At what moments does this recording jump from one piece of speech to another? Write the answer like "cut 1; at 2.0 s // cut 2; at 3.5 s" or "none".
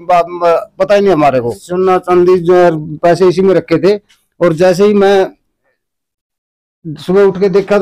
cut 1; at 1.6 s

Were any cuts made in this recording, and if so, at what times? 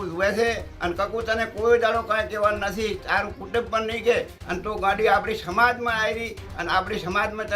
none

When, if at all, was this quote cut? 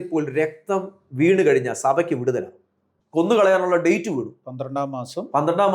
cut 1; at 3.3 s

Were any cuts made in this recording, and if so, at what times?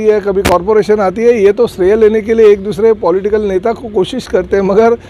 none

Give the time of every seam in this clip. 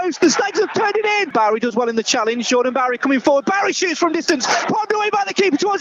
cut 1; at 1.3 s

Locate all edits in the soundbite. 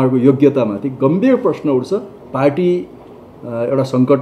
cut 1; at 2.2 s

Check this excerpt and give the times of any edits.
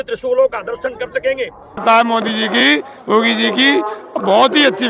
cut 1; at 1.8 s

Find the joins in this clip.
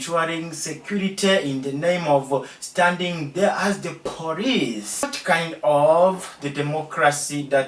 cut 1; at 5.1 s

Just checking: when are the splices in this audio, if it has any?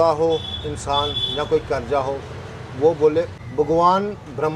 cut 1; at 3.3 s

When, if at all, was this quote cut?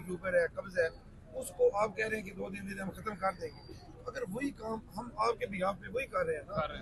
none

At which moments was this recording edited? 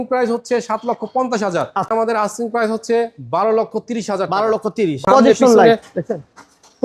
cut 1; at 1.9 s // cut 2; at 5.0 s

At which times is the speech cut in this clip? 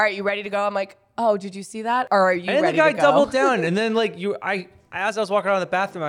cut 1; at 2.1 s

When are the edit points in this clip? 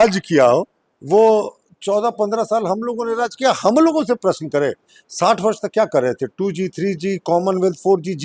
none

